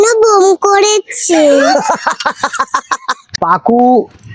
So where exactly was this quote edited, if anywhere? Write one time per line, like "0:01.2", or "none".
0:03.2